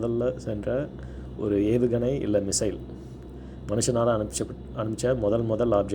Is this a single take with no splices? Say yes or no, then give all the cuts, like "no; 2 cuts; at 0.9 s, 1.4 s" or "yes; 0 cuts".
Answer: yes; 0 cuts